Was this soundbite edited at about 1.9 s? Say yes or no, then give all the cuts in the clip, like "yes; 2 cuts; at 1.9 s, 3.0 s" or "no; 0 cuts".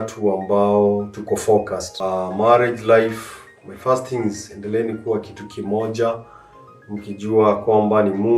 yes; 1 cut; at 1.9 s